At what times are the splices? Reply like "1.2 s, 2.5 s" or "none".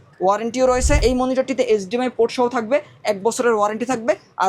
1.0 s